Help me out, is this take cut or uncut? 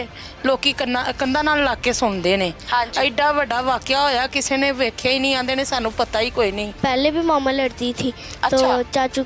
cut